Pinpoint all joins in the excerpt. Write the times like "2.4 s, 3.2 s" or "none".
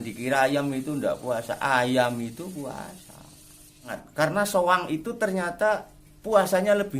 4.0 s